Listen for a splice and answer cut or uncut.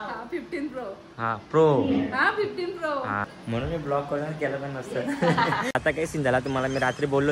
cut